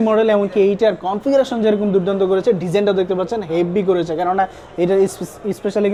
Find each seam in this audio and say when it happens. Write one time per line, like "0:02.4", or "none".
none